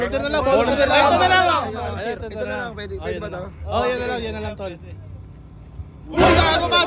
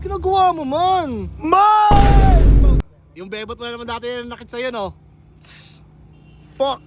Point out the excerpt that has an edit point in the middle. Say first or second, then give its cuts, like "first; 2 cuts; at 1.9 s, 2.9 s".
second; 1 cut; at 2.8 s